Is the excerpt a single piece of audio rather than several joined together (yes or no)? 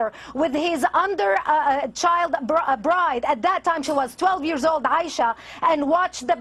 yes